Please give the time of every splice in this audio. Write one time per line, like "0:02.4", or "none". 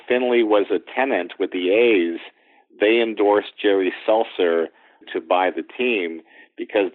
0:05.1